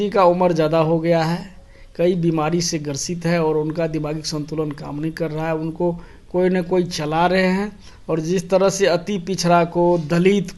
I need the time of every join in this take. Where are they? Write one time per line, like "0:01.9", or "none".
none